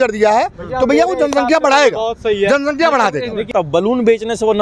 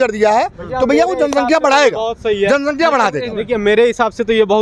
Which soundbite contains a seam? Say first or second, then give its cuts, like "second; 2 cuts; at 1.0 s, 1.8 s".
first; 1 cut; at 3.5 s